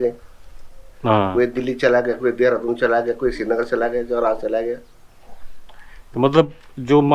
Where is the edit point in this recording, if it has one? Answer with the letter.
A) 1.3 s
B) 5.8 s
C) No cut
C